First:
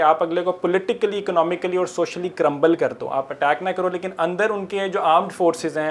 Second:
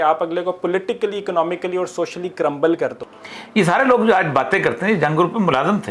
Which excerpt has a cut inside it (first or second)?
second